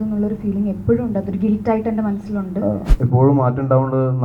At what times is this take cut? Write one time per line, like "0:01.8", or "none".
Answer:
0:02.9